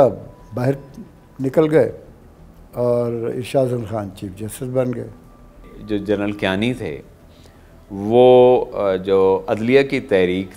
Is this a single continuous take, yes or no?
no